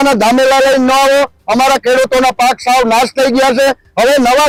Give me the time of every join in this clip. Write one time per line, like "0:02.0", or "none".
none